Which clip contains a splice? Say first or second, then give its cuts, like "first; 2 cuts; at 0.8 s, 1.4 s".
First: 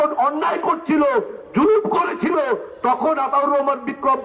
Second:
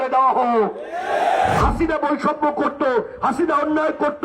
second; 1 cut; at 1.6 s